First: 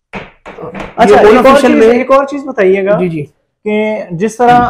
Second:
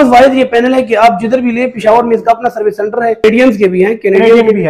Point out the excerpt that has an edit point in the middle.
second; 1 cut; at 3.2 s

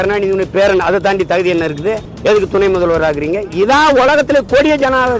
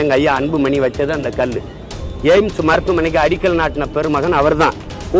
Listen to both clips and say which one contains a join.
first; 1 cut; at 2.1 s

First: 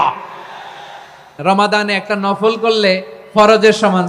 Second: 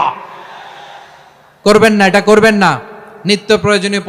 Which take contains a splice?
first; 1 cut; at 1.4 s

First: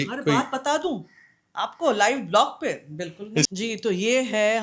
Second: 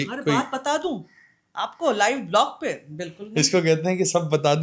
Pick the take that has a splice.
first; 1 cut; at 3.5 s

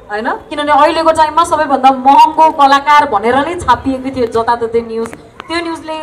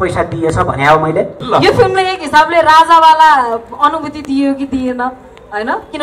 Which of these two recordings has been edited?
second; 1 cut; at 1.4 s

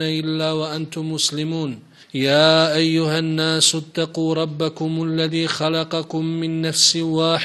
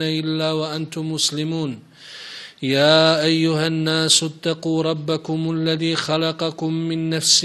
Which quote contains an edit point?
first; 1 cut; at 1.9 s

